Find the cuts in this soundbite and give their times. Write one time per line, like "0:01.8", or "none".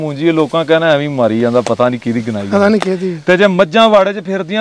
none